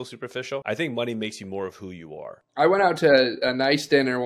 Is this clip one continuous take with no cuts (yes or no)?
no